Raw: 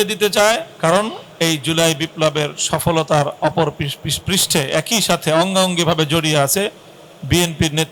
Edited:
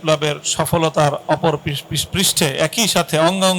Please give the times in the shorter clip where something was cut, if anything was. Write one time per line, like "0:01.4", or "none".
none